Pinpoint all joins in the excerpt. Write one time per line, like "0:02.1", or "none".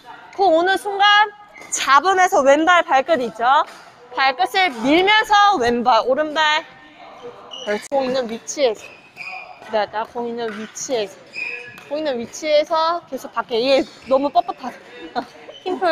0:07.9